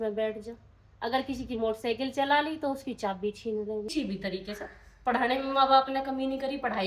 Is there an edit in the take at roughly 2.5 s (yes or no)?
no